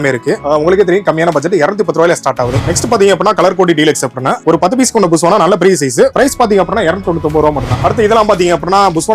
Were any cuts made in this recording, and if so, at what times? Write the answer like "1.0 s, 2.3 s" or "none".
7.7 s

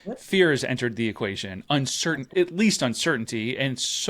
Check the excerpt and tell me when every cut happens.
2.2 s

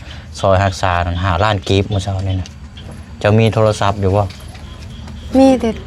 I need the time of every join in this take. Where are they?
none

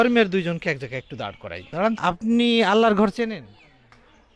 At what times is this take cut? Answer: 2.0 s

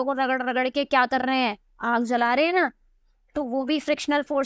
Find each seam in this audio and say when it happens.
none

